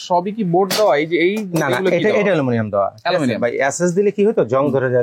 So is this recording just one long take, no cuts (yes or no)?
yes